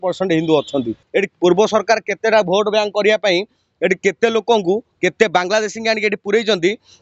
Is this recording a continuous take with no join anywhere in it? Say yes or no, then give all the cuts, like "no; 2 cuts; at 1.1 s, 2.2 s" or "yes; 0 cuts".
no; 1 cut; at 1.0 s